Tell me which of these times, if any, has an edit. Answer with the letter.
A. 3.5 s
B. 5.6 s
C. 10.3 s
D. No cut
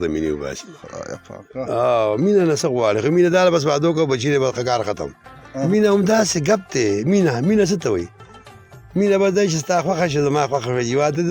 B